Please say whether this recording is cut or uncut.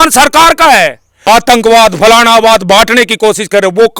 cut